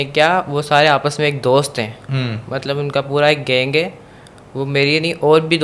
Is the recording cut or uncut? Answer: uncut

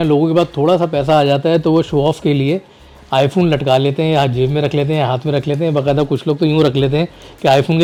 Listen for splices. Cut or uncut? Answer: uncut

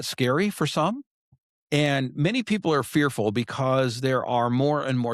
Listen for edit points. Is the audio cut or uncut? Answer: cut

